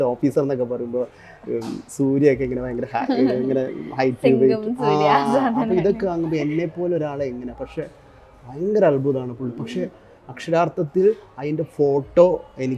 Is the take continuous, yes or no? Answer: yes